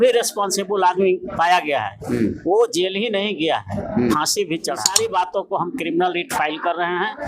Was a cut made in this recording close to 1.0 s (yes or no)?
no